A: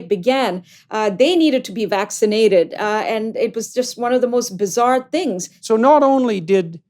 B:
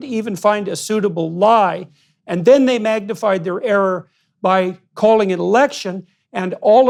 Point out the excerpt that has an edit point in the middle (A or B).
A